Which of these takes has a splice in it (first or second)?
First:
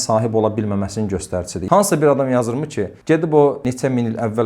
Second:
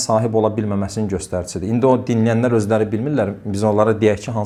first